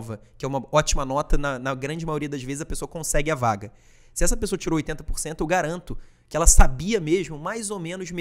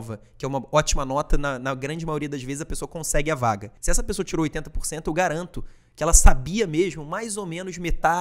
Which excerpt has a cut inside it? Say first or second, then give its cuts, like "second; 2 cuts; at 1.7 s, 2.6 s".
second; 1 cut; at 3.8 s